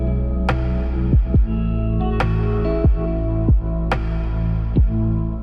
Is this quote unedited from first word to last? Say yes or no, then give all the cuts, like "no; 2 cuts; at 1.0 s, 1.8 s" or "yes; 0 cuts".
yes; 0 cuts